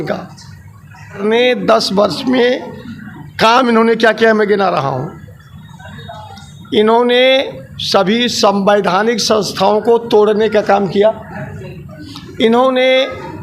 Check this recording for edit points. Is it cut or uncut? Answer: cut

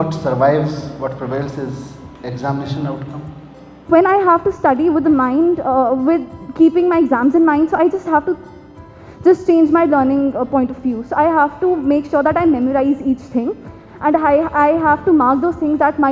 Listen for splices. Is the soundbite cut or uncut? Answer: uncut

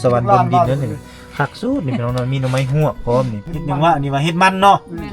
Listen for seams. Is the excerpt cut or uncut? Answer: cut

